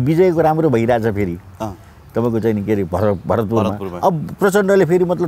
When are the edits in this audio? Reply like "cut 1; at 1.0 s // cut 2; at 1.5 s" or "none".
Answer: none